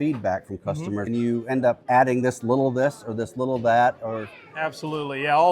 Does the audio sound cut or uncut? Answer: cut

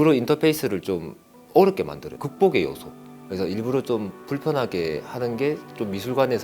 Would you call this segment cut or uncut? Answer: uncut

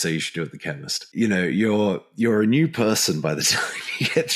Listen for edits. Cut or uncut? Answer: cut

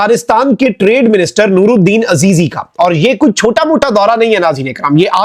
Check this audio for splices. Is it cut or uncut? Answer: uncut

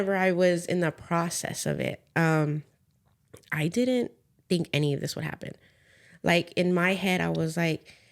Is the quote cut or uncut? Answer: uncut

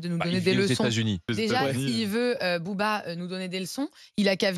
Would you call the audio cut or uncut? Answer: cut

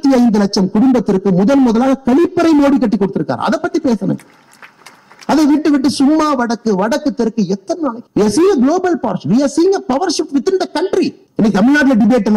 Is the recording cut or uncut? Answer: cut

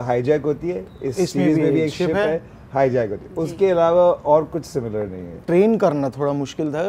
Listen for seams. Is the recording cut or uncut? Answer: cut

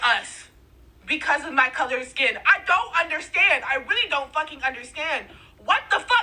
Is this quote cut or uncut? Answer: cut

